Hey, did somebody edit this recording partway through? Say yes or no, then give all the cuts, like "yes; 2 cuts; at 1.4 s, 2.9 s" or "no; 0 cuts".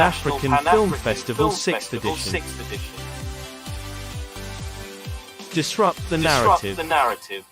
yes; 1 cut; at 6.5 s